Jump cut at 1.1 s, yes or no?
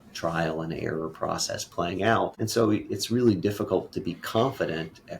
no